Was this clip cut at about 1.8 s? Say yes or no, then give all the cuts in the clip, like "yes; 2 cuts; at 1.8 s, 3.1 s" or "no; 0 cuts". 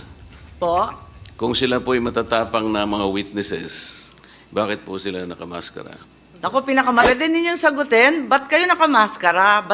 no; 1 cut; at 7.1 s